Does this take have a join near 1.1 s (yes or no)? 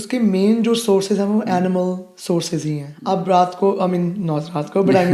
no